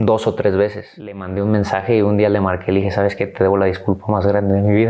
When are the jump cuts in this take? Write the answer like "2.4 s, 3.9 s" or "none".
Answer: 1.3 s